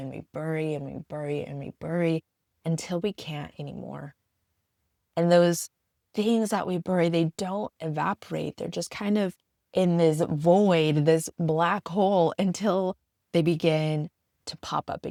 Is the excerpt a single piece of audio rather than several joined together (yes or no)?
yes